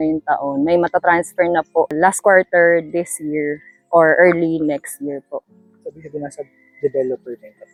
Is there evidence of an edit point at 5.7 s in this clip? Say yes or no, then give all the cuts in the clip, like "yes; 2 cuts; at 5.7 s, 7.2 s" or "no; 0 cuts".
no; 0 cuts